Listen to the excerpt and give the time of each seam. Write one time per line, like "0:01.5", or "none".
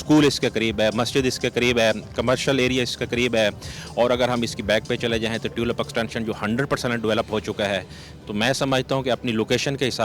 none